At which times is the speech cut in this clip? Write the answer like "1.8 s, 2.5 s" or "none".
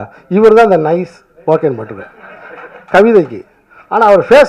none